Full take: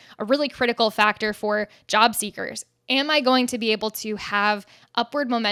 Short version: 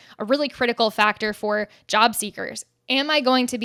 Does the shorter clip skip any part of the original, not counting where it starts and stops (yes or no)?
no